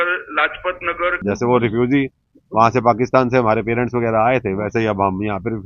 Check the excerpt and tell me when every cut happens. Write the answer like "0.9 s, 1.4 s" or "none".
1.2 s